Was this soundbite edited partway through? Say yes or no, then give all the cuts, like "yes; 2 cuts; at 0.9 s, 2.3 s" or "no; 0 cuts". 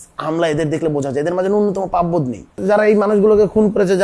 yes; 1 cut; at 2.6 s